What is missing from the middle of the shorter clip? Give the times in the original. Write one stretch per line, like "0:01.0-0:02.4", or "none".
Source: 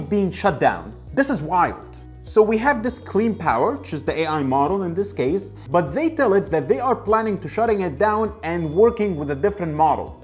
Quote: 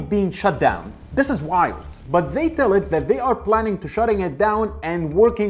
0:02.0-0:05.6